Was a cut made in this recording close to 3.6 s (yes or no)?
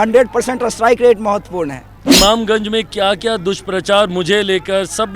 no